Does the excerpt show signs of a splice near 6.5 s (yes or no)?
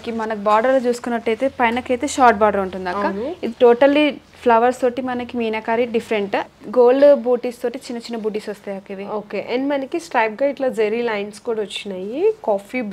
yes